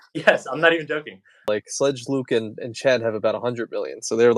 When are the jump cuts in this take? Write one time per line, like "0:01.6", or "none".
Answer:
0:01.5